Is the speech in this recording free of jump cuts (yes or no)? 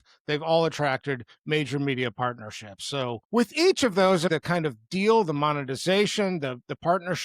no